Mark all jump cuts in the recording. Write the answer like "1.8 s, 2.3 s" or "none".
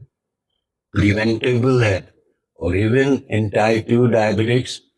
none